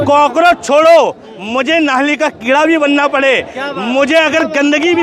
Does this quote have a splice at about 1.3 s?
no; 0 cuts

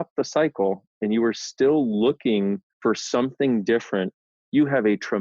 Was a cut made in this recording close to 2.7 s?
yes; 2 cuts; at 2.7 s, 4.2 s

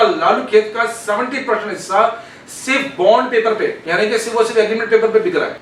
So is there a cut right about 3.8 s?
yes; 1 cut; at 3.8 s

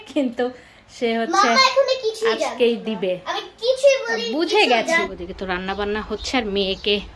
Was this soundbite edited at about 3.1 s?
no; 1 cut; at 5.2 s

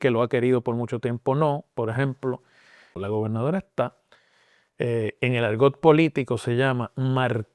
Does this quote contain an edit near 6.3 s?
no; 1 cut; at 2.9 s

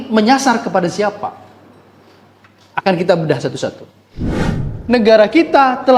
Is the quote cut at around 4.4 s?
yes; 1 cut; at 4.4 s

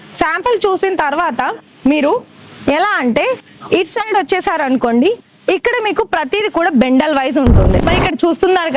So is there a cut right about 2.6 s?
no; 1 cut; at 7.8 s

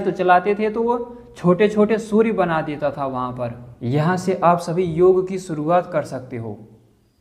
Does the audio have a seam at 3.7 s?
yes; 1 cut; at 3.7 s

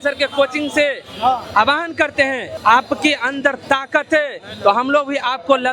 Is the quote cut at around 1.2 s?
no; 1 cut; at 2.5 s

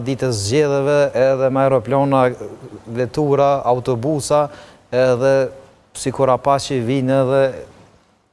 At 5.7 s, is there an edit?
no; 0 cuts

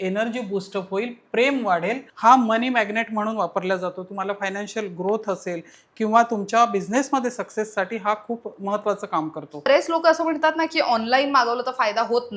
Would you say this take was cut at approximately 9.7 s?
yes; 2 cuts; at 2.1 s, 9.7 s

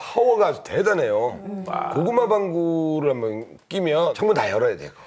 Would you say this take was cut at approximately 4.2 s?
yes; 1 cut; at 4.2 s

